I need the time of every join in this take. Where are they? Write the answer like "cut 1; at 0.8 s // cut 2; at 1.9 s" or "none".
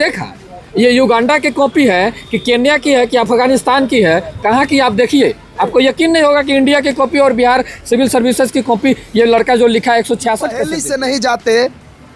cut 1; at 10.8 s